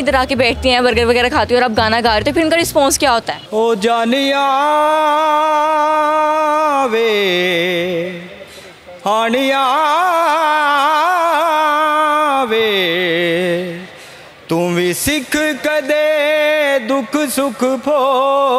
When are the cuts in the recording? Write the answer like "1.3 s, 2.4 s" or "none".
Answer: 3.4 s